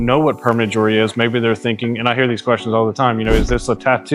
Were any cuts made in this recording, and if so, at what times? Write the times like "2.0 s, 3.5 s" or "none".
none